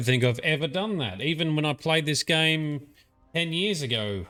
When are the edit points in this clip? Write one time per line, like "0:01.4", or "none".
none